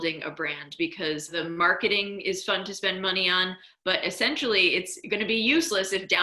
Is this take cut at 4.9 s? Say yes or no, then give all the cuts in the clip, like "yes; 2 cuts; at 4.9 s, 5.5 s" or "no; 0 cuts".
no; 1 cut; at 1.3 s